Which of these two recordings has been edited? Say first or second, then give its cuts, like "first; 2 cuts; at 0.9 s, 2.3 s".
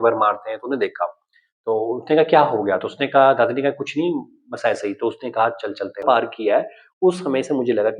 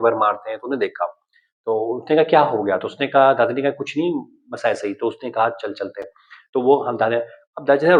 first; 1 cut; at 6.0 s